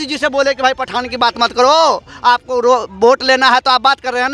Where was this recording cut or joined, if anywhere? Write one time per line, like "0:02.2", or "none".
none